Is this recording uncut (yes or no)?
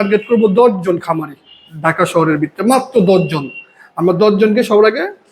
yes